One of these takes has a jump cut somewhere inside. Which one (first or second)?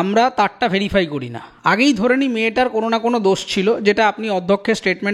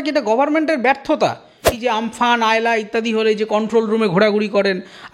second